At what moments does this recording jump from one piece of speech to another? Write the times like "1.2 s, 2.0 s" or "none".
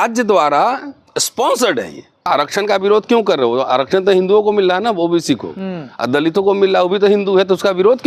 2.2 s

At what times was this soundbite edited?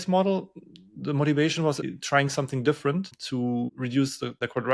1.8 s

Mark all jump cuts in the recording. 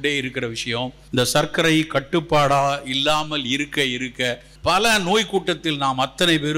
1.0 s, 4.5 s

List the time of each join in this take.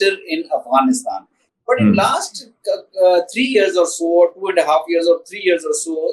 1.4 s

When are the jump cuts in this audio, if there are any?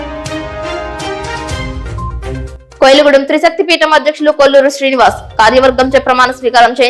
2.4 s

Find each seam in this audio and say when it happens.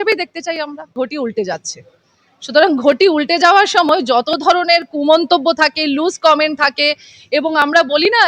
0.9 s

